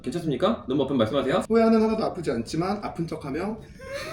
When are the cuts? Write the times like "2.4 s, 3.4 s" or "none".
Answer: 1.5 s